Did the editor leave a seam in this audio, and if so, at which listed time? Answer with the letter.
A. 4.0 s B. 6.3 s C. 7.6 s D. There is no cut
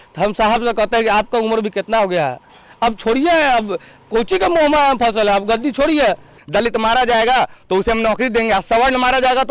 B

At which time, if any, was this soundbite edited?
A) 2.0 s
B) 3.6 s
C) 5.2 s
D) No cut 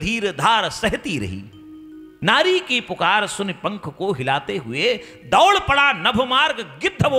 A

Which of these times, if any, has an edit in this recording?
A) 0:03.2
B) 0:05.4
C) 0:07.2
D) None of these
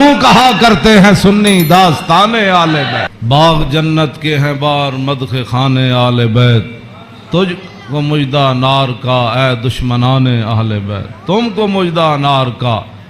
A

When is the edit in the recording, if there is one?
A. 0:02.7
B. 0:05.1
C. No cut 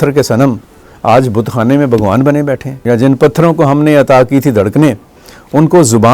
A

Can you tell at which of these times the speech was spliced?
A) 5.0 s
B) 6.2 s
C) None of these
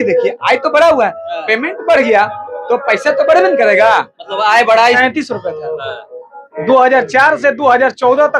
A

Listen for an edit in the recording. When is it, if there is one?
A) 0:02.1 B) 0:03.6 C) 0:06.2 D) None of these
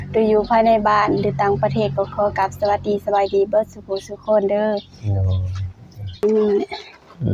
C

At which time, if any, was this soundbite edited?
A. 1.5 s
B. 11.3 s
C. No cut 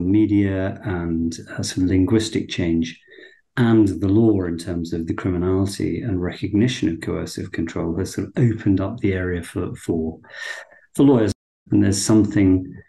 B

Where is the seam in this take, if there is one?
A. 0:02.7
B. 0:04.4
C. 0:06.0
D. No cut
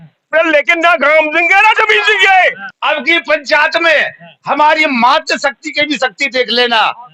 A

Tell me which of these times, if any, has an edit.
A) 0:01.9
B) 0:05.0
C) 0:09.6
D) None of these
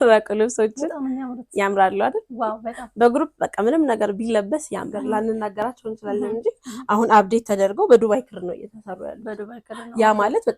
B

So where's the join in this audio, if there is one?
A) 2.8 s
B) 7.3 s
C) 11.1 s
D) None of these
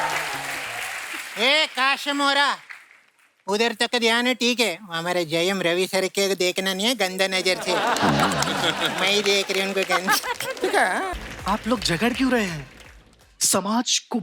C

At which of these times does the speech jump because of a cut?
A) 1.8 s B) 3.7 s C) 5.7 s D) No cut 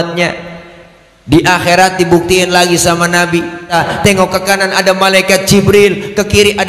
B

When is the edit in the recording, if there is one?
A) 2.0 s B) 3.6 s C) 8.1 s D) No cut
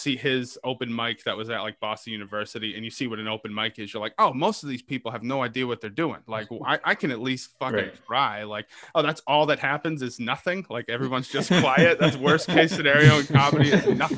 D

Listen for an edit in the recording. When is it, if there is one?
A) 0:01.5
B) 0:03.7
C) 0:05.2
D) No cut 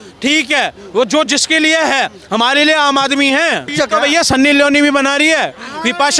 B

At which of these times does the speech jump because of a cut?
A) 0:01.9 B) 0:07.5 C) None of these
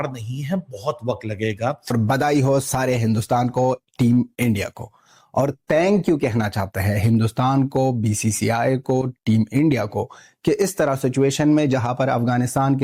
A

